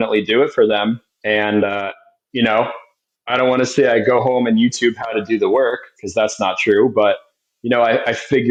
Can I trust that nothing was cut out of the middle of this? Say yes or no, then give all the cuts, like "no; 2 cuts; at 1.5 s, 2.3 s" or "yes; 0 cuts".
yes; 0 cuts